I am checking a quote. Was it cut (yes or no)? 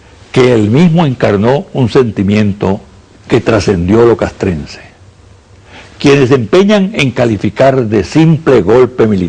yes